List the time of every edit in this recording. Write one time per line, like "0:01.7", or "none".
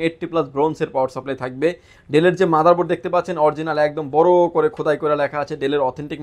none